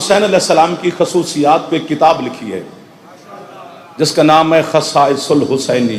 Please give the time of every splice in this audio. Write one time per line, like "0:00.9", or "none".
none